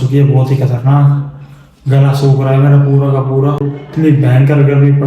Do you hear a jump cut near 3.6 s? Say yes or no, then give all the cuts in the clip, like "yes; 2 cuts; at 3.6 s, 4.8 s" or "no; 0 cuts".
yes; 1 cut; at 3.6 s